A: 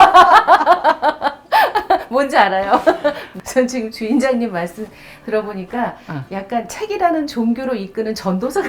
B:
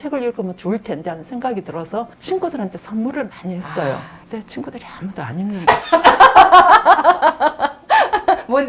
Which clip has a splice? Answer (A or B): A